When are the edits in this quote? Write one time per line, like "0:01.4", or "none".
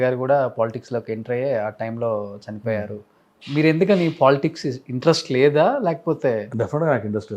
none